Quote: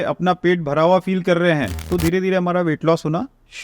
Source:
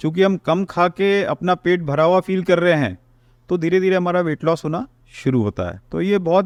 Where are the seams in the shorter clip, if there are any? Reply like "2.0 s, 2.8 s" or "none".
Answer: 1.8 s